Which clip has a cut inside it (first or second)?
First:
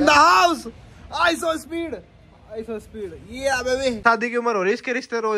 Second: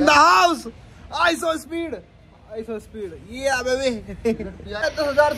first